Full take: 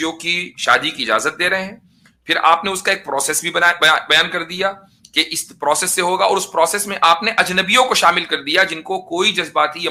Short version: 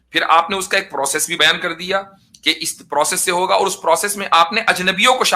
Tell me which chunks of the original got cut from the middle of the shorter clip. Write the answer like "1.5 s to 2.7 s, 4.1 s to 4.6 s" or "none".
3.5 s to 4.0 s